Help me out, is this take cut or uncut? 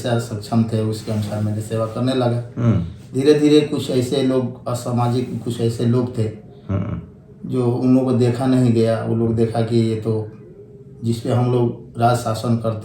uncut